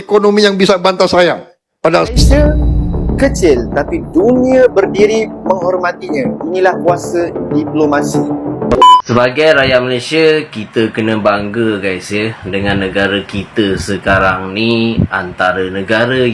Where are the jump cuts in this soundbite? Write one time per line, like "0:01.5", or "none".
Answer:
0:02.1
0:09.0